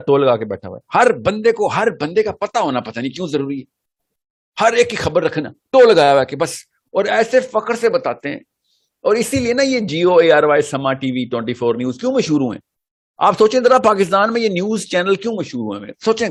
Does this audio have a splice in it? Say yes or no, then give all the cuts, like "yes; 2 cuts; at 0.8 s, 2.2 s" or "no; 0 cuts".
no; 0 cuts